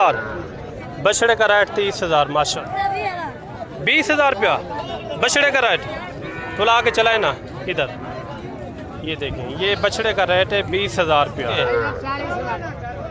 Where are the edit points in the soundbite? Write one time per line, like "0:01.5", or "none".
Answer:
0:02.5
0:11.6